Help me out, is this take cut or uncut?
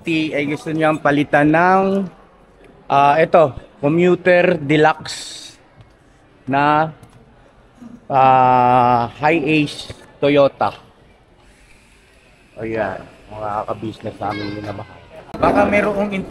cut